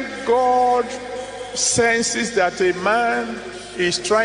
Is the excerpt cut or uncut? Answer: uncut